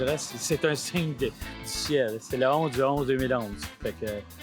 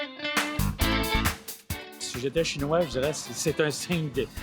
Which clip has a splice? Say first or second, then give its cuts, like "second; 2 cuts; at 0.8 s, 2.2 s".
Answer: second; 1 cut; at 2.0 s